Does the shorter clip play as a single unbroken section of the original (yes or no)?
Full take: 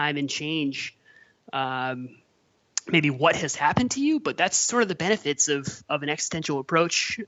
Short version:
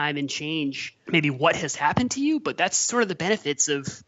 no